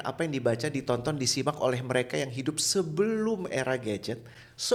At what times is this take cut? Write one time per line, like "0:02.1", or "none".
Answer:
none